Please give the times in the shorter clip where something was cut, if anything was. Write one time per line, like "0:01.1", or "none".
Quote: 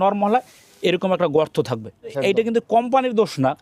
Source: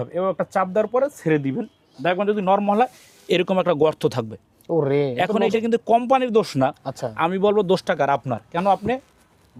0:02.3